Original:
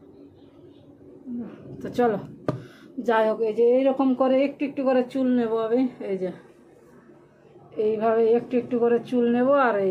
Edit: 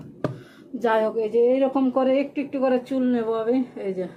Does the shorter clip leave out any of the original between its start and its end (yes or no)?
no